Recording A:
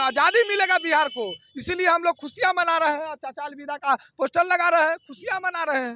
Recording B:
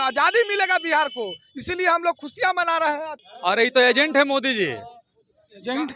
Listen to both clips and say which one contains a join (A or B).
B